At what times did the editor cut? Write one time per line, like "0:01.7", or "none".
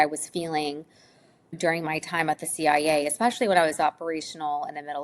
0:01.6